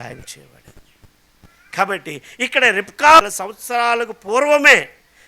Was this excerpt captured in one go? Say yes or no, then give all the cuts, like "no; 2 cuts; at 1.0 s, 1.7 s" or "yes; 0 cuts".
no; 1 cut; at 3.4 s